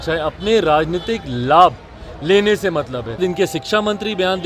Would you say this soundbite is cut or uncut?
cut